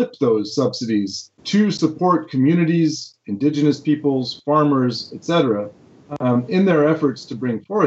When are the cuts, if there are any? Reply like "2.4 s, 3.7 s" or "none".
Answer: 1.3 s